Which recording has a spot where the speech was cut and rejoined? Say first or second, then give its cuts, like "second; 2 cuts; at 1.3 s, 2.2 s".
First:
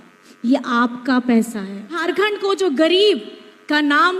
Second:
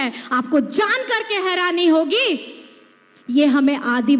first; 1 cut; at 2.0 s